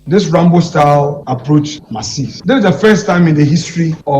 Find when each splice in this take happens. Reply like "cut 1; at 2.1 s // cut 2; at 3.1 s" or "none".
cut 1; at 2.3 s